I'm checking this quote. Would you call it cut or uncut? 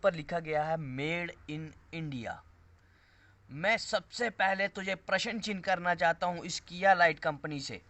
uncut